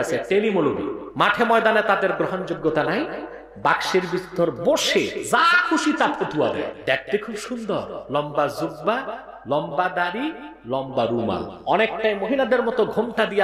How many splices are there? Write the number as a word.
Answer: three